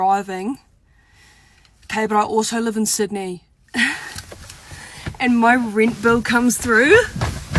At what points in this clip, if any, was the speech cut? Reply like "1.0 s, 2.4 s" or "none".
none